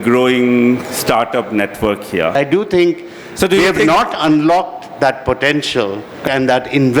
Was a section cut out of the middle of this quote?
yes; 2 cuts; at 2.4 s, 6.2 s

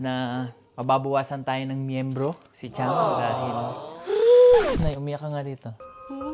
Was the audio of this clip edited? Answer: no; 0 cuts

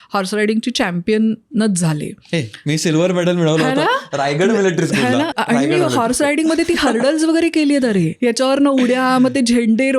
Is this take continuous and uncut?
no; 2 cuts; at 5.3 s, 8.1 s

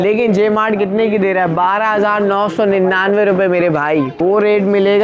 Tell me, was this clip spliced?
yes; 1 cut; at 4.1 s

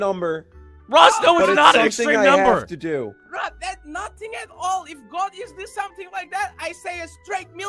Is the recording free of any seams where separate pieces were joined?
yes; 0 cuts

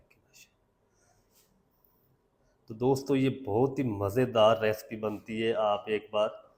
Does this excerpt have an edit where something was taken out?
no; 0 cuts

